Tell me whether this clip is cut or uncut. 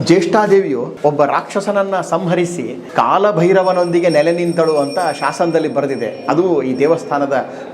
cut